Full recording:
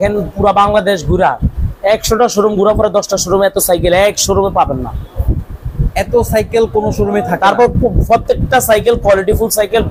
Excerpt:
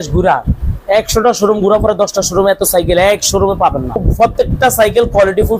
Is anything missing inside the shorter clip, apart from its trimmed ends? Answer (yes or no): yes